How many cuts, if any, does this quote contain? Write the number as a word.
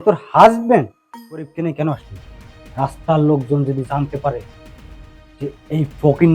one